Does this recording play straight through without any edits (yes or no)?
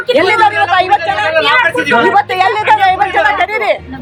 yes